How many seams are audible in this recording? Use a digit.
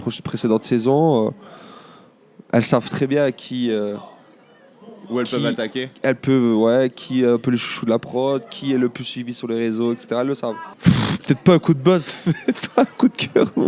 1